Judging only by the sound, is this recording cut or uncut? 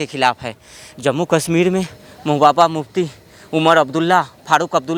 uncut